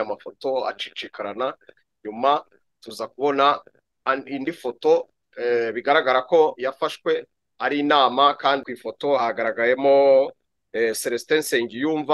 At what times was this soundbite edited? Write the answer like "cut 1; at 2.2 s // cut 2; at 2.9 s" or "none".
cut 1; at 8.7 s